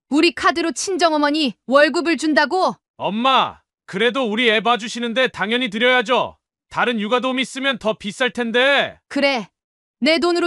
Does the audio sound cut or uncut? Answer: cut